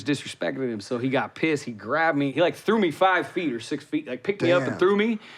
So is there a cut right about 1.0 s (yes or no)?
no